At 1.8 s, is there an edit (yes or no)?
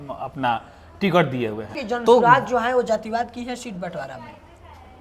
yes